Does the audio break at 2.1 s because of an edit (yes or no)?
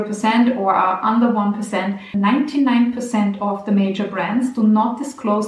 yes